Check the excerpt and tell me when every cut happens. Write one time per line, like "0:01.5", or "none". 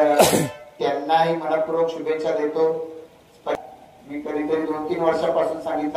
0:03.5